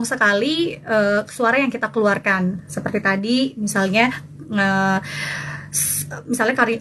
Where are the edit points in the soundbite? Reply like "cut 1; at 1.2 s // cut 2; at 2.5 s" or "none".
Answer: none